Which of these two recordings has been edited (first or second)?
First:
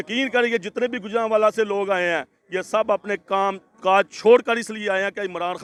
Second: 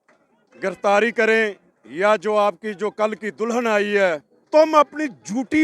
second